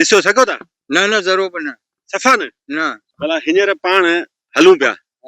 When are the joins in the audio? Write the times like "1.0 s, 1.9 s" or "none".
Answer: 3.0 s